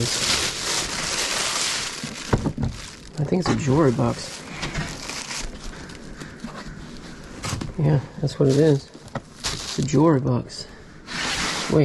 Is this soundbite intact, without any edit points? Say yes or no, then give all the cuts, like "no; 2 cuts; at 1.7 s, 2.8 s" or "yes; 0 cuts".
yes; 0 cuts